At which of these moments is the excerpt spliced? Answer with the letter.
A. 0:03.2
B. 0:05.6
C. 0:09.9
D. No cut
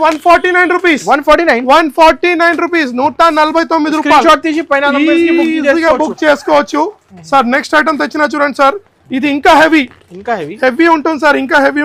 D